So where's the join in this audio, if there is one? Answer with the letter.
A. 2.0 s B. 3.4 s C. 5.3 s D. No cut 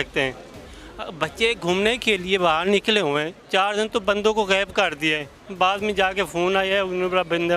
B